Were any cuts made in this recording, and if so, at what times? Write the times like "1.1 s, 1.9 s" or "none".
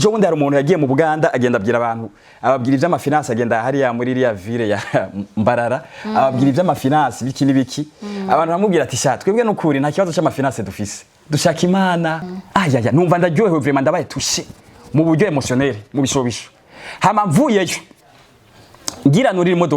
12.3 s